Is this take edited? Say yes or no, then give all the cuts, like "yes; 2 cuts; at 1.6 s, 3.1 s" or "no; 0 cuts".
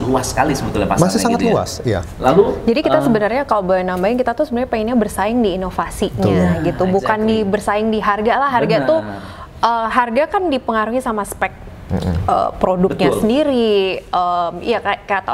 no; 0 cuts